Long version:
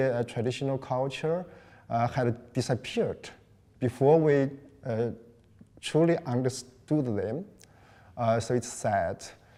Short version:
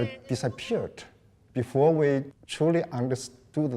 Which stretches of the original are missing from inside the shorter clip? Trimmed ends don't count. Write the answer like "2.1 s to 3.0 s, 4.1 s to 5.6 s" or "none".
4.7 s to 5.7 s